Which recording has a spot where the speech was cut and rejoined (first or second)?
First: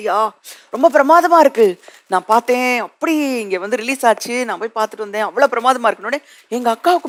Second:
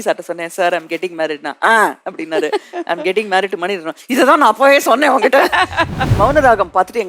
second